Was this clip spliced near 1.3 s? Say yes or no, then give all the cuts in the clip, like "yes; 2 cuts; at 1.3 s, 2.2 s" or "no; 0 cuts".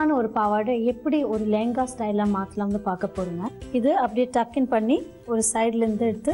no; 1 cut; at 3.6 s